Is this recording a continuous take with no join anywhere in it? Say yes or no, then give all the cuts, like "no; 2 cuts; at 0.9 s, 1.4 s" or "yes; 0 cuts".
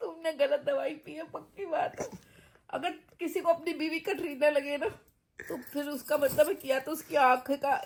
yes; 0 cuts